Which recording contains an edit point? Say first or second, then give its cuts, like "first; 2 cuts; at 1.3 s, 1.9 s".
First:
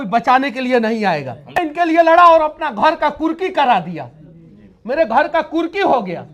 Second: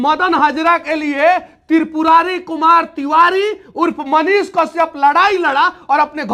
first; 1 cut; at 1.6 s